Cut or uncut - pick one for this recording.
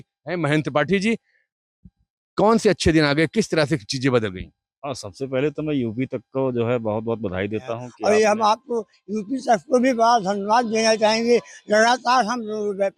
cut